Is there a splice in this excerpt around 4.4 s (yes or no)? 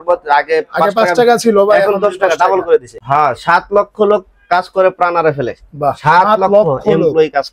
no